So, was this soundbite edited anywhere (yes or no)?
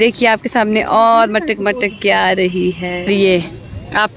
yes